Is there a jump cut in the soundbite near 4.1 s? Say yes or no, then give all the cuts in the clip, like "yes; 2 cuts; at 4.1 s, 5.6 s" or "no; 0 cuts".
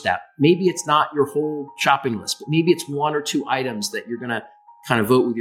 no; 0 cuts